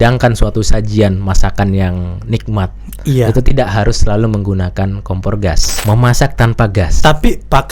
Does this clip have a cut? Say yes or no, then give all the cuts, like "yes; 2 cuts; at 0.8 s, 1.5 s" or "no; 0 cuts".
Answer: yes; 1 cut; at 5.7 s